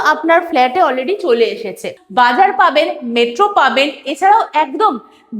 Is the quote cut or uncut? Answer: cut